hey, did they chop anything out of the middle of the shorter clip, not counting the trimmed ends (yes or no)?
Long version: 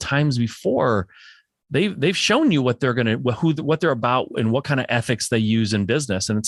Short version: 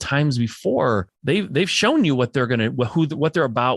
yes